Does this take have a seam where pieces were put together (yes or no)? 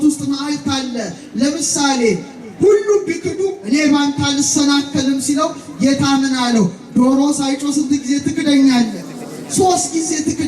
no